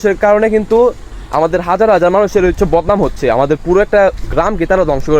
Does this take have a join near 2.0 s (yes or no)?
no